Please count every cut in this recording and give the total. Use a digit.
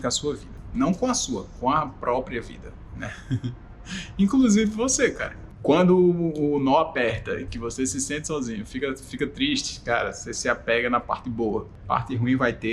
2